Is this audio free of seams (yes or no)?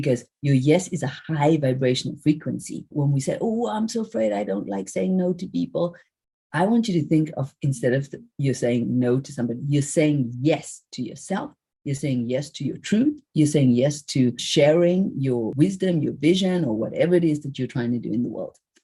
yes